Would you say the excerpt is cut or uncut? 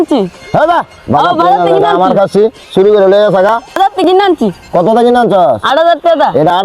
cut